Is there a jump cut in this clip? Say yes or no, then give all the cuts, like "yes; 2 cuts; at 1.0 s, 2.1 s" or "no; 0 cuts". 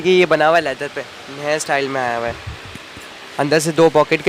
no; 0 cuts